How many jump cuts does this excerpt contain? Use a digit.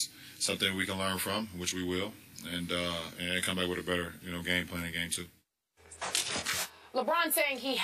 1